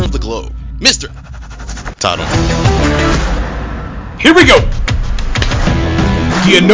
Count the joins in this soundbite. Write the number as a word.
zero